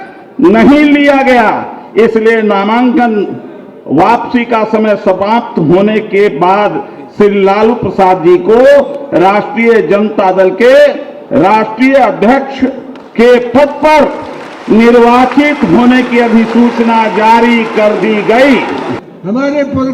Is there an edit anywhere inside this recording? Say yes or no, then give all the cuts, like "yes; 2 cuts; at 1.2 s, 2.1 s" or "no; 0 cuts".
yes; 1 cut; at 19.0 s